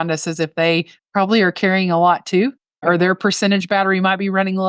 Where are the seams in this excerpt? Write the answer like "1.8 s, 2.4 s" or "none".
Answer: 2.8 s